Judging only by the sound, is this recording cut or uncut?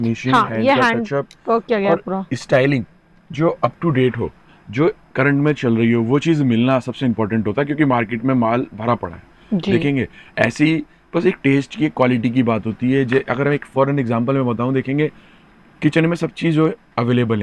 uncut